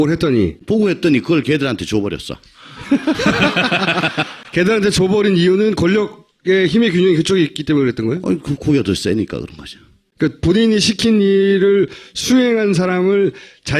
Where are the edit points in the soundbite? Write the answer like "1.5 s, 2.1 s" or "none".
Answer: none